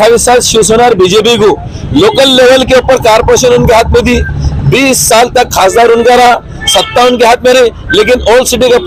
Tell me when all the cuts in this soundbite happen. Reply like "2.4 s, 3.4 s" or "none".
none